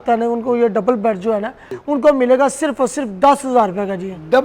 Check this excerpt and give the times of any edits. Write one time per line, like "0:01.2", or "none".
0:01.7